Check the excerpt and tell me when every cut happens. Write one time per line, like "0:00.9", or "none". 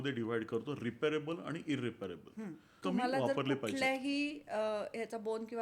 0:02.8